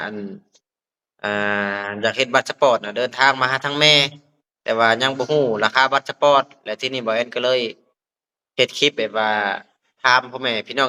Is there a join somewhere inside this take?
no; 0 cuts

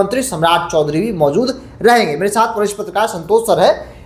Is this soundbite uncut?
yes; 0 cuts

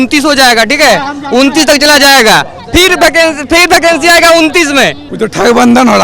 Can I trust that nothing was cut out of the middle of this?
no; 1 cut; at 5.0 s

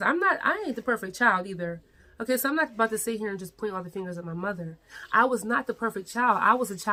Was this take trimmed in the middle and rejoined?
no; 0 cuts

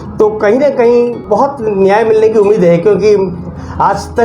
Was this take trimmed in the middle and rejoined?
yes; 1 cut; at 1.2 s

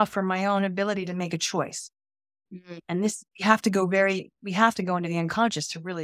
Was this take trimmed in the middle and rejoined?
no; 0 cuts

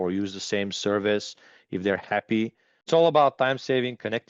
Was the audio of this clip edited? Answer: yes; 1 cut; at 2.7 s

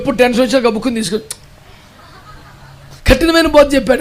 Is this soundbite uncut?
no; 1 cut; at 3.0 s

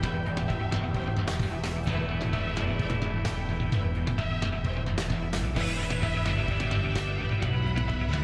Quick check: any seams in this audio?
no; 0 cuts

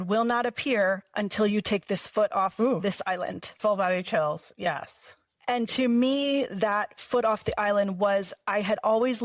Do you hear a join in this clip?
no; 0 cuts

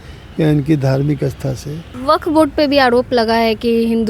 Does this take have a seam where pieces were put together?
yes; 1 cut; at 1.9 s

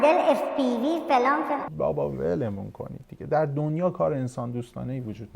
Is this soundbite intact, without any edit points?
no; 1 cut; at 1.6 s

